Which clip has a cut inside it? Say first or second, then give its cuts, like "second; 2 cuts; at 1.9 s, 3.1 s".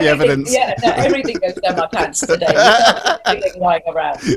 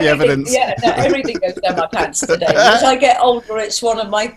second; 1 cut; at 2.8 s